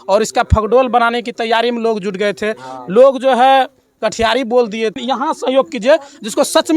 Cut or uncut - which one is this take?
cut